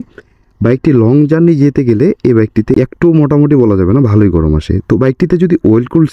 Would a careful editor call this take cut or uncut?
cut